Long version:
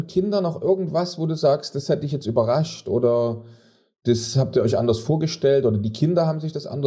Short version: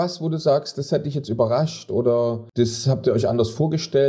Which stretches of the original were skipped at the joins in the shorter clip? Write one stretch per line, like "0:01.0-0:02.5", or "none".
0:03.4-0:03.9